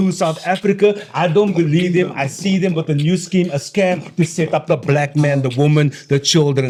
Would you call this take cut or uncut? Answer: uncut